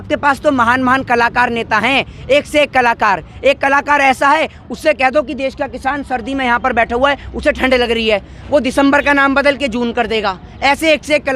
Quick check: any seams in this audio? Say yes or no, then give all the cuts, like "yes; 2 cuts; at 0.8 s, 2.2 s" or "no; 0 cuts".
no; 0 cuts